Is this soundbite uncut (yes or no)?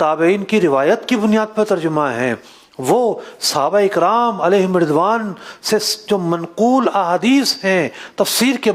yes